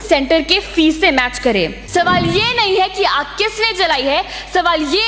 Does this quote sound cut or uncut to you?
cut